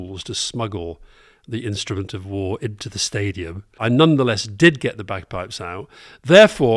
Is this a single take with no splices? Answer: no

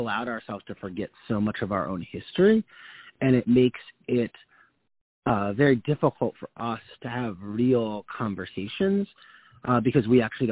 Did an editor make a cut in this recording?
no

